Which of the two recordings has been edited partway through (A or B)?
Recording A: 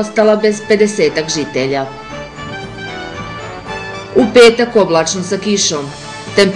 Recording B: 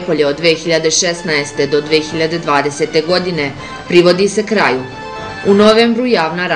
A